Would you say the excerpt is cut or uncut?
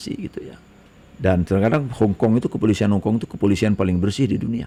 uncut